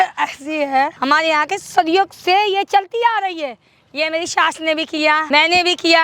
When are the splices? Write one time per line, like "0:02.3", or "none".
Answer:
0:00.9
0:05.2